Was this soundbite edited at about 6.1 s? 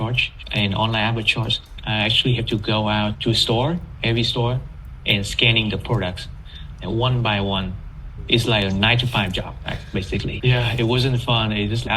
no; 1 cut; at 1.8 s

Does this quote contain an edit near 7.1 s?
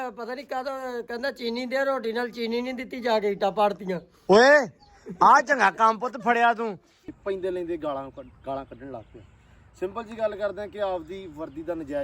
yes; 1 cut; at 7.1 s

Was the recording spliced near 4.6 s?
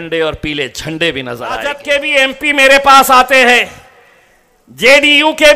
no; 1 cut; at 1.8 s

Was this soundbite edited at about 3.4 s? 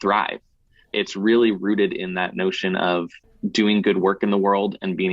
yes; 2 cuts; at 0.9 s, 3.4 s

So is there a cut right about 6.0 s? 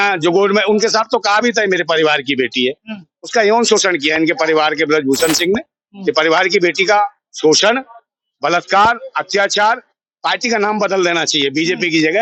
no; 0 cuts

